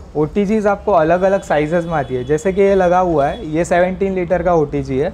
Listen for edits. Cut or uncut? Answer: uncut